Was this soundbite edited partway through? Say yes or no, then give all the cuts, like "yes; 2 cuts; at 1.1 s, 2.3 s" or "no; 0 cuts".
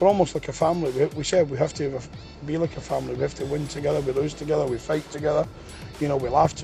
no; 0 cuts